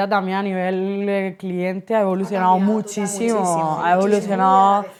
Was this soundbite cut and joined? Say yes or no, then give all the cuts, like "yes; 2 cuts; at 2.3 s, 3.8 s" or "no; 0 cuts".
no; 0 cuts